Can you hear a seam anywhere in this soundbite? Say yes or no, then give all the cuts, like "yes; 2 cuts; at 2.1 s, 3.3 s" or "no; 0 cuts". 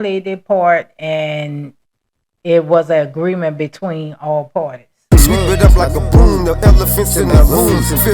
yes; 1 cut; at 4.9 s